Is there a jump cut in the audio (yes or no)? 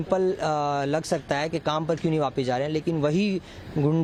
no